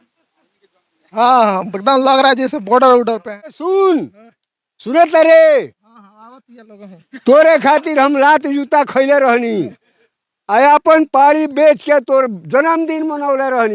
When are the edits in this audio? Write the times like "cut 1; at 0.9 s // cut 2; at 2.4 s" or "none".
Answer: cut 1; at 3.6 s